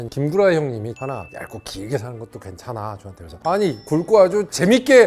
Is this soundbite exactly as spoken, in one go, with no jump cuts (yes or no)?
no